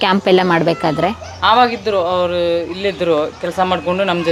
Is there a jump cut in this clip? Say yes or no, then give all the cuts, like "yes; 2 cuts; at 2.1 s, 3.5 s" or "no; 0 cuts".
no; 0 cuts